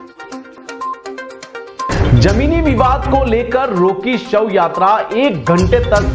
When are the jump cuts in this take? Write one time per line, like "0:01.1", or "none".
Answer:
0:01.6